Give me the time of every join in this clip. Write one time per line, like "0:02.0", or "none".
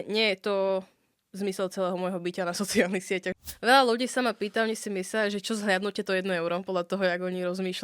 0:03.4